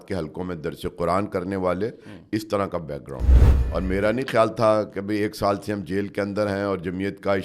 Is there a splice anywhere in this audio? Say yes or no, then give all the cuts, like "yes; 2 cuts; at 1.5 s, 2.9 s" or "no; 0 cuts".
yes; 1 cut; at 3.4 s